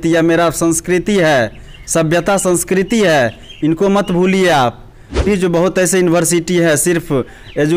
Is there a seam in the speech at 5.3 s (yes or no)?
yes